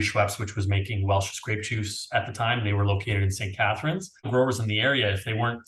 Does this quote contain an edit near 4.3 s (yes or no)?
yes